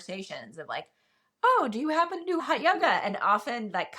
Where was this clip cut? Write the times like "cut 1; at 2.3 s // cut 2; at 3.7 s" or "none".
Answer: cut 1; at 2.4 s